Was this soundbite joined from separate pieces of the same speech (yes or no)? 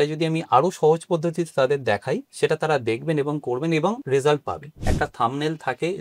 yes